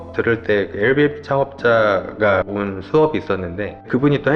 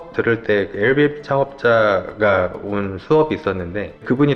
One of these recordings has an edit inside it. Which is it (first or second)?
first